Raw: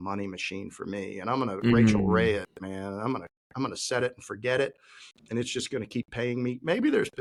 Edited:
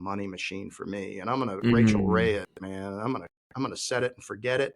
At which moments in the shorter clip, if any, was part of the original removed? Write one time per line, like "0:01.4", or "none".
none